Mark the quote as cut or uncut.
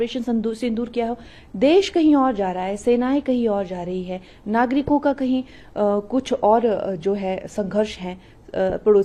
uncut